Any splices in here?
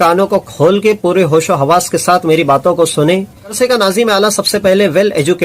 yes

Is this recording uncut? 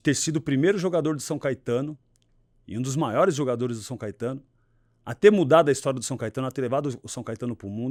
yes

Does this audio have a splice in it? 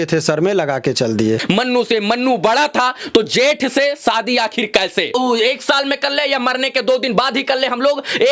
yes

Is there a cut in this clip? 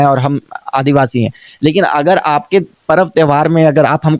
no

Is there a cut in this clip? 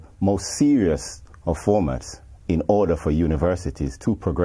no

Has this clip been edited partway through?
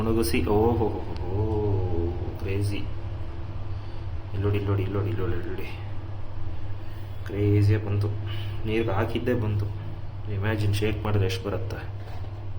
no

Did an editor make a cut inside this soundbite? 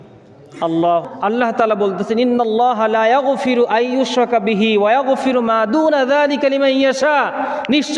yes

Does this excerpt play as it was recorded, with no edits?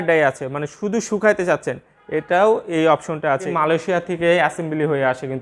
no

